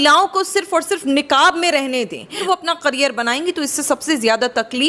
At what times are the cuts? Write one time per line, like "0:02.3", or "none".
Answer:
0:02.4